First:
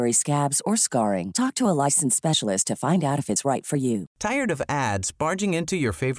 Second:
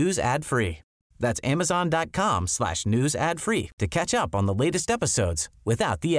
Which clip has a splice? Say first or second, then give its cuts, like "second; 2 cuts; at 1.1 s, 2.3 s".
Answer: first; 1 cut; at 4.1 s